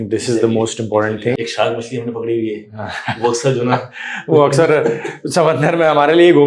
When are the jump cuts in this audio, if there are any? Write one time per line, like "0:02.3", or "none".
0:01.4